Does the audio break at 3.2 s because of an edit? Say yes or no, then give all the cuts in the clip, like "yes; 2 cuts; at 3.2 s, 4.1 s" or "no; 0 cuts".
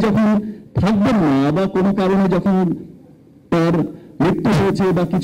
no; 0 cuts